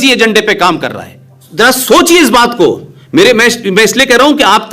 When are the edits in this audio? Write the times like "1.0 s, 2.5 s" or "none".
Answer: 1.4 s